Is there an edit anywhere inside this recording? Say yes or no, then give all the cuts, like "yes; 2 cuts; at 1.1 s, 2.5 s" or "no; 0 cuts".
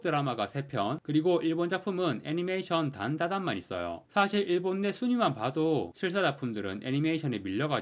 no; 0 cuts